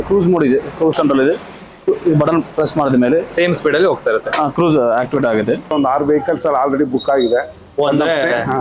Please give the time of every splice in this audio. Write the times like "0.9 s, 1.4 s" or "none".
5.7 s